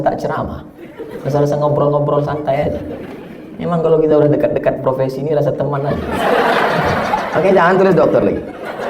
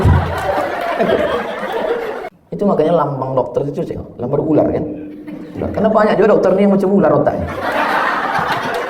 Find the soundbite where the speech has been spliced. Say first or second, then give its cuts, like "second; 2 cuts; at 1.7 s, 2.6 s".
second; 1 cut; at 2.4 s